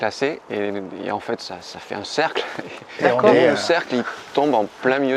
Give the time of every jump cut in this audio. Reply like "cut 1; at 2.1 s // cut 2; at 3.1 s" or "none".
none

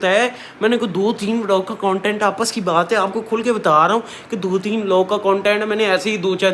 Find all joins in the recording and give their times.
none

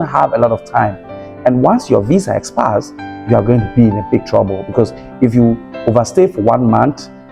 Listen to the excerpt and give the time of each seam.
none

